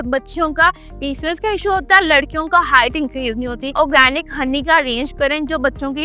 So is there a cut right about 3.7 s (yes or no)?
yes